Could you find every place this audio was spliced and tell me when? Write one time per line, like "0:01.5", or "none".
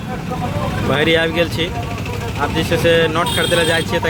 none